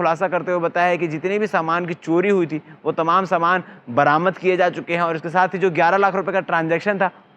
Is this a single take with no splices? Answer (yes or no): yes